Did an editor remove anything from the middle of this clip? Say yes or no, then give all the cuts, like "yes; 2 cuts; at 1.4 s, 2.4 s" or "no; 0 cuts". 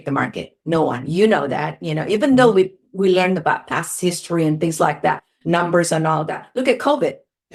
no; 0 cuts